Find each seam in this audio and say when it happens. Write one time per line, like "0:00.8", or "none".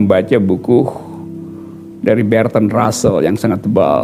none